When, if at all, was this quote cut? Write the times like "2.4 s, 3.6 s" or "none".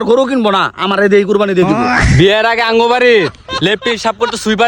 2.2 s